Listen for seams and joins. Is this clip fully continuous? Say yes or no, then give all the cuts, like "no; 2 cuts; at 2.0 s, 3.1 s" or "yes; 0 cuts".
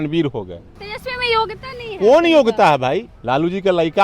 no; 2 cuts; at 0.9 s, 3.1 s